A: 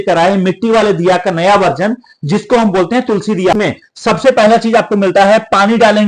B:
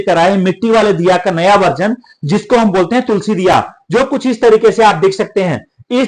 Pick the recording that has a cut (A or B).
A